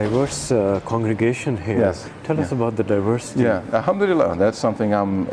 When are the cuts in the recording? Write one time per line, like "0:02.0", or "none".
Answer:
none